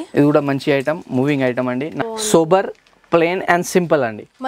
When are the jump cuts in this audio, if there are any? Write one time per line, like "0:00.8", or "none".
0:01.9